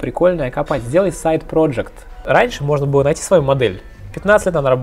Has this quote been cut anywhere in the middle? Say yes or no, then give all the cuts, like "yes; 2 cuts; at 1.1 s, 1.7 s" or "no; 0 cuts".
yes; 1 cut; at 2.1 s